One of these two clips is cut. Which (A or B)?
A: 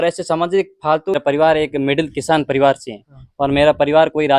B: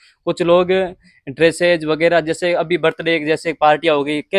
A